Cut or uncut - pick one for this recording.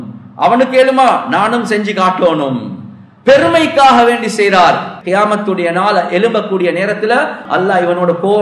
cut